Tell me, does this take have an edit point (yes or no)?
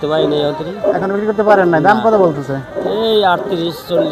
no